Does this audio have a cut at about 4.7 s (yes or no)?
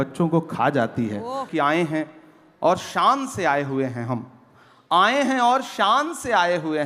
no